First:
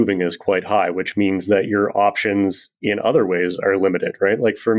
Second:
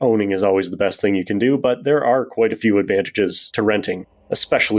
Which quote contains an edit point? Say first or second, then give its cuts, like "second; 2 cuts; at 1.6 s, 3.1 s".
second; 1 cut; at 3.8 s